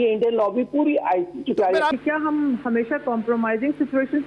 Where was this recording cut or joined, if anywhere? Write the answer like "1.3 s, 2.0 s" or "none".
2.0 s

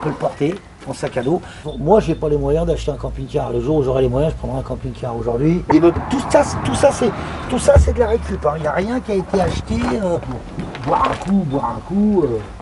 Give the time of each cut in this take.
1.6 s, 5.6 s, 10.3 s

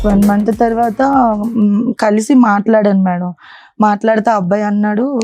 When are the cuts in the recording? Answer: none

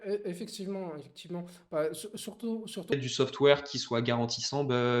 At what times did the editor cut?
3.0 s

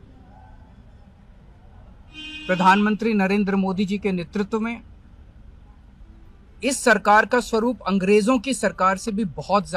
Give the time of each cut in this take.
none

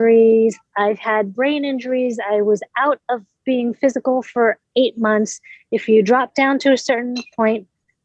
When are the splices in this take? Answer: none

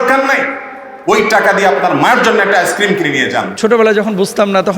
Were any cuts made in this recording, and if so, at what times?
3.5 s

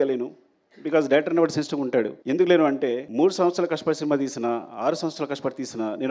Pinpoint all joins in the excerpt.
2.2 s, 3.0 s

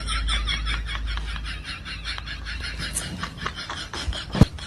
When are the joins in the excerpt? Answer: none

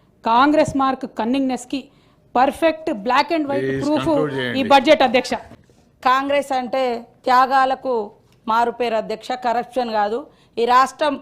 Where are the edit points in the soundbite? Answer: 5.7 s

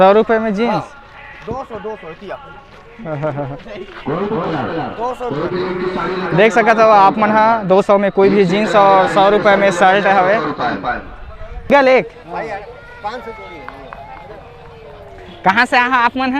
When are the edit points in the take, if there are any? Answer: 11.7 s

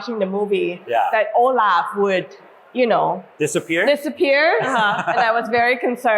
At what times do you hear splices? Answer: 3.3 s

